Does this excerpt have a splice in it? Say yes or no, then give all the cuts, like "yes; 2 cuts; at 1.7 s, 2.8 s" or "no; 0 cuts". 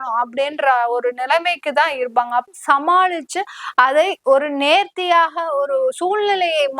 yes; 1 cut; at 2.5 s